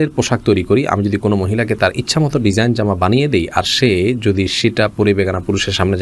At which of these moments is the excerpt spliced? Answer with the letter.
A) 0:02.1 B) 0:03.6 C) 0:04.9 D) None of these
D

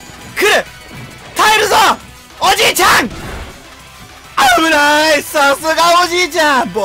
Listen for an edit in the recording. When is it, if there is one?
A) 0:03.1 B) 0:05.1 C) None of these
C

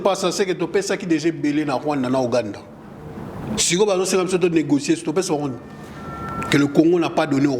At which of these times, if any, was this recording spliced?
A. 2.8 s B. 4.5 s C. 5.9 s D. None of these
D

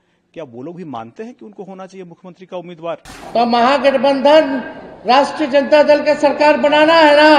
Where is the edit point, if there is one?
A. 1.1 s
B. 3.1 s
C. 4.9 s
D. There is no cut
B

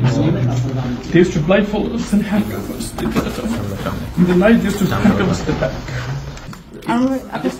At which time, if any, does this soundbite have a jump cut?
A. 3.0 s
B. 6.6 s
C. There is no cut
B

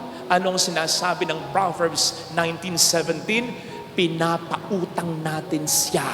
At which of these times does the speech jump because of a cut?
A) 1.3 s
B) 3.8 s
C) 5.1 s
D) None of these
D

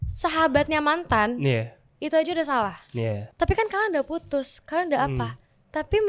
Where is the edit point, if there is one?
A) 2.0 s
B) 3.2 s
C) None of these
B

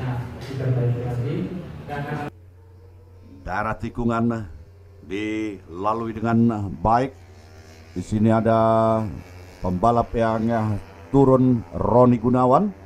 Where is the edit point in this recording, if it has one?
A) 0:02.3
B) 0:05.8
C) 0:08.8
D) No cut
A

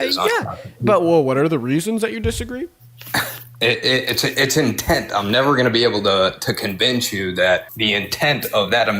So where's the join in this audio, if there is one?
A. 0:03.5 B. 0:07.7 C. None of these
B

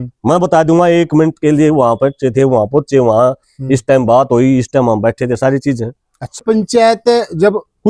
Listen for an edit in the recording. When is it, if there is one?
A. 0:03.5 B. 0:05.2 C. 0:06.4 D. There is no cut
C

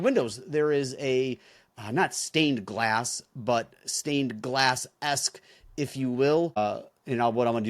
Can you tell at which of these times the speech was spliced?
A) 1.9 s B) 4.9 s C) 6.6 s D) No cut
C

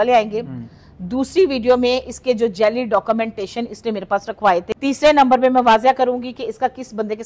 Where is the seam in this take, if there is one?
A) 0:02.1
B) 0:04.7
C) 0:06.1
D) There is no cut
B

